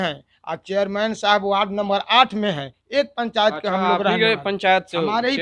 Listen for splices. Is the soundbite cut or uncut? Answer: uncut